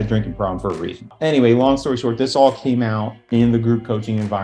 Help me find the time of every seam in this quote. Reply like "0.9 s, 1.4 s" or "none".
1.1 s